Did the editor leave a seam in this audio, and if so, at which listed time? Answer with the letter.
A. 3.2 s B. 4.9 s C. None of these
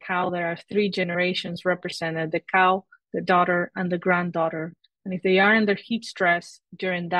C